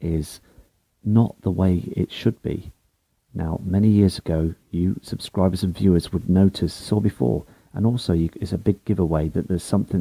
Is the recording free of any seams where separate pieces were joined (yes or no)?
yes